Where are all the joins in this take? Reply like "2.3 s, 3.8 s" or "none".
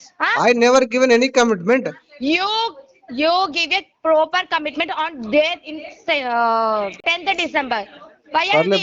7.0 s